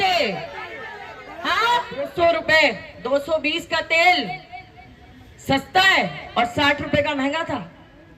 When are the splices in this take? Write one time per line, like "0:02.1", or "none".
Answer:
0:02.1

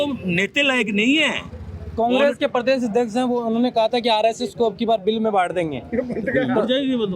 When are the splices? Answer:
none

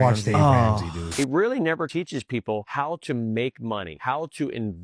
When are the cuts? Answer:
0:01.1

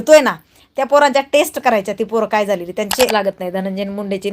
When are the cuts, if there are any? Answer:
0:03.1

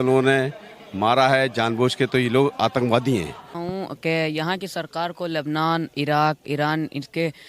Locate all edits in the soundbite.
0:03.5

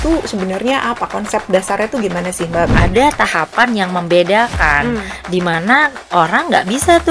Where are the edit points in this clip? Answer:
0:02.7

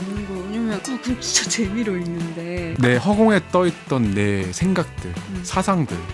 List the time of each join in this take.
0:00.8
0:02.7

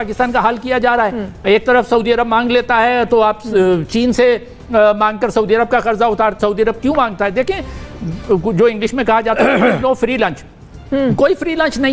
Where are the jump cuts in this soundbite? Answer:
none

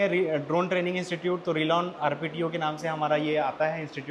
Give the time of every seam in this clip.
none

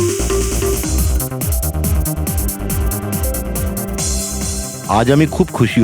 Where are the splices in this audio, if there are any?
0:04.8

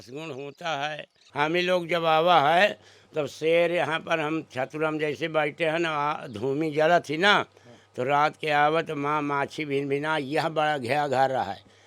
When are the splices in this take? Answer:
0:01.2

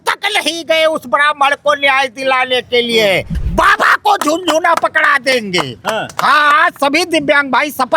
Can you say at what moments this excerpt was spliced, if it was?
0:03.4

